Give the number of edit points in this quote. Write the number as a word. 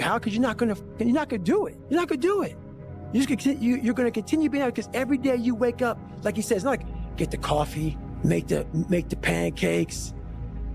two